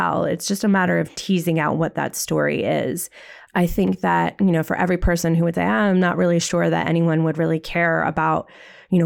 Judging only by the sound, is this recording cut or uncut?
uncut